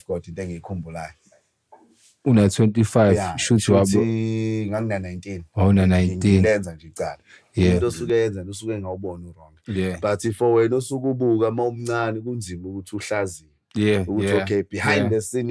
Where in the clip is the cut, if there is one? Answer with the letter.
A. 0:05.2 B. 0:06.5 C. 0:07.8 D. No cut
C